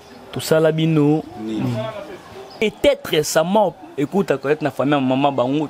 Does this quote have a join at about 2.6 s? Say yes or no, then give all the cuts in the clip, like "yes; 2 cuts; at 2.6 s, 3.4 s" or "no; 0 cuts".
yes; 1 cut; at 2.6 s